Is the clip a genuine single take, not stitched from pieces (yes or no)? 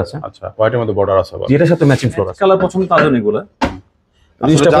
no